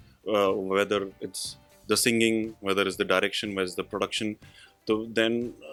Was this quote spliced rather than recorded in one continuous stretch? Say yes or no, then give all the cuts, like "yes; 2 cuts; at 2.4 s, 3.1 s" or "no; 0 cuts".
no; 0 cuts